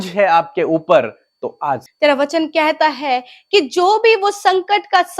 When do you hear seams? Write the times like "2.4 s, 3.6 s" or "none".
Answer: 1.9 s